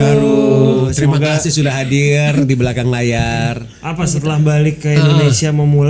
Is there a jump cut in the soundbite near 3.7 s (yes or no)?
yes